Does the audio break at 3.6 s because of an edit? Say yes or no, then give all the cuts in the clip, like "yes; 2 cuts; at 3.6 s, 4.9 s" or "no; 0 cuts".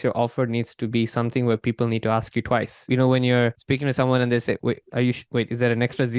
yes; 3 cuts; at 2.9 s, 3.6 s, 5.2 s